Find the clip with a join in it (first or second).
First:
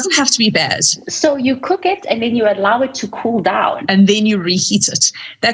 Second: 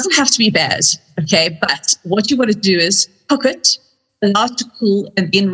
first